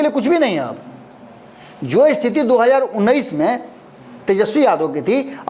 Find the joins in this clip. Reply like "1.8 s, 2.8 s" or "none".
none